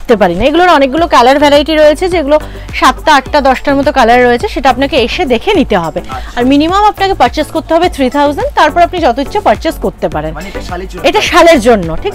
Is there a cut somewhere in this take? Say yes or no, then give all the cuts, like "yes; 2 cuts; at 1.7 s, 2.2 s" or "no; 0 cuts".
no; 0 cuts